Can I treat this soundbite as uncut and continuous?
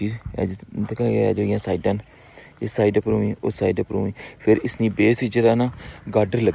yes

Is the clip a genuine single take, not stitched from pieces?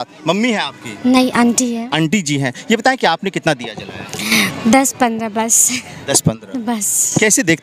yes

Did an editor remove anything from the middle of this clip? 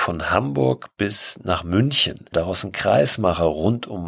yes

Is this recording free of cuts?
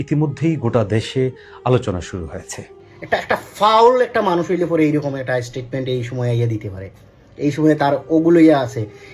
no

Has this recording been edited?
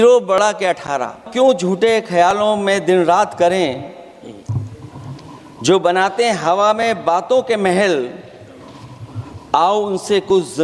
yes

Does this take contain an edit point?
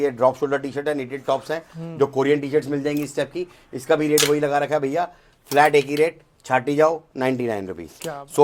no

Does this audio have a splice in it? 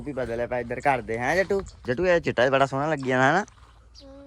yes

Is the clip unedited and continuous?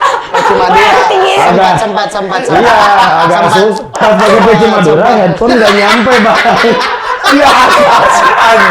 no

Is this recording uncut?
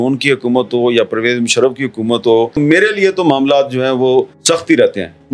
no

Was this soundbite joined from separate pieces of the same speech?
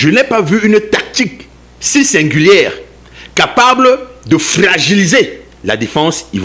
no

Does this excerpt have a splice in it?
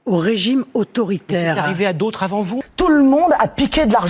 yes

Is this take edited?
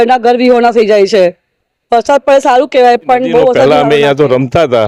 yes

